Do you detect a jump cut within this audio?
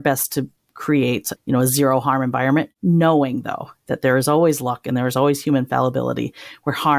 yes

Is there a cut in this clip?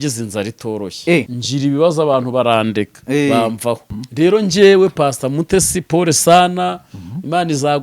yes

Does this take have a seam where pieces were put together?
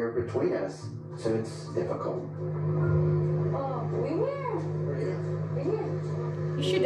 no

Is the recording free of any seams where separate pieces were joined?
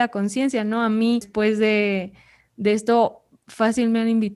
no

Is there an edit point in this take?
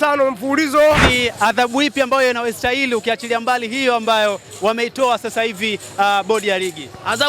yes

